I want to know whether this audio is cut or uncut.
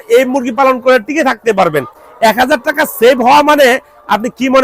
cut